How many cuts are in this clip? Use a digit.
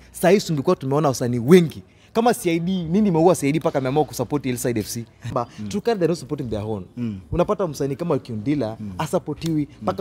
1